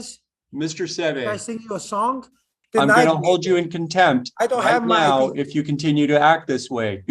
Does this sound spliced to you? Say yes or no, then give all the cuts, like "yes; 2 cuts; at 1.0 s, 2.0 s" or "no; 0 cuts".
yes; 1 cut; at 2.6 s